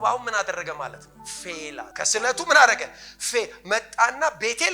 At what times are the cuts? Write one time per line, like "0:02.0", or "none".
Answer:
0:01.9

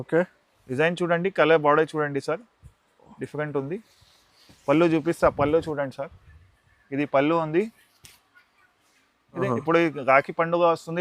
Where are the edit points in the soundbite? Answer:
0:09.4

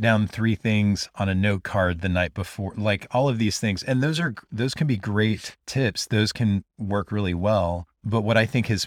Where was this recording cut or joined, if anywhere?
none

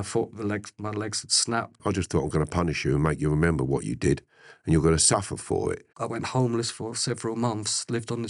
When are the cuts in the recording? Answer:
0:01.8
0:05.9

